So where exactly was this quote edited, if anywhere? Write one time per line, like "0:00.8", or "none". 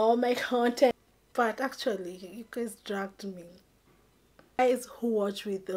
0:00.9
0:04.6